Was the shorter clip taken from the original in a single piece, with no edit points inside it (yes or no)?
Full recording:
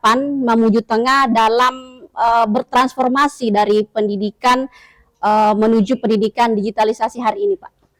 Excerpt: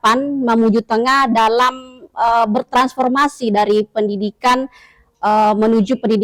yes